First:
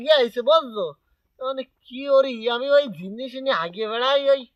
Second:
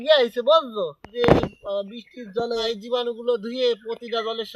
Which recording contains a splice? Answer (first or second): second